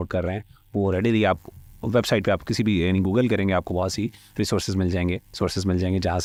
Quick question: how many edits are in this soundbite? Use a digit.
0